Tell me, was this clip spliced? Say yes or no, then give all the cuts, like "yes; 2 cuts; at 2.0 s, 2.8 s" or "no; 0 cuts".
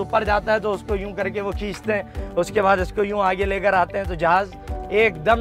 no; 0 cuts